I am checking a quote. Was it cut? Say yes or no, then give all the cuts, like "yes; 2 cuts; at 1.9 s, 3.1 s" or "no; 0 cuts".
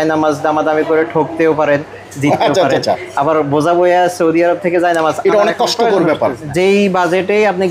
yes; 1 cut; at 6.5 s